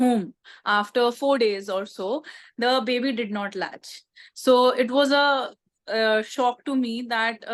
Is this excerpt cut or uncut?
uncut